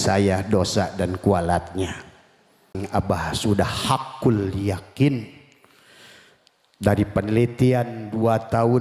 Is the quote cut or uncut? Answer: cut